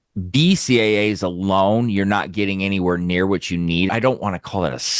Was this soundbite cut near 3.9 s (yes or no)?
yes